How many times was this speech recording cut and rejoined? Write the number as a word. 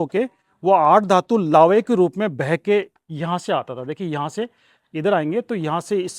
zero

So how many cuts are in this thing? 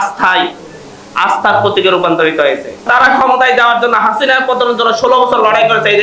one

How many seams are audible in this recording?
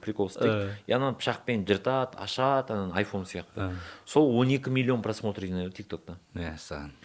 zero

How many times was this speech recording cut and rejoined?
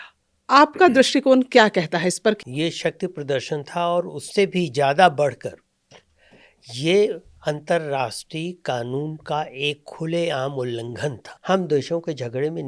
two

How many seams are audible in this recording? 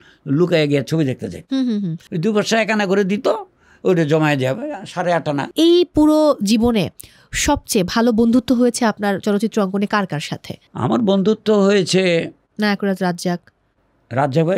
zero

